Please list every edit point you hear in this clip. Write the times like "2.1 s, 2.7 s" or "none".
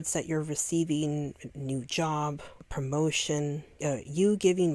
2.5 s, 3.7 s